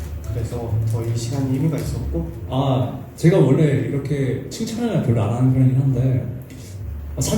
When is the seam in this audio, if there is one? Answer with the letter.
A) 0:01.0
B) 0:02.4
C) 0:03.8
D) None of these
B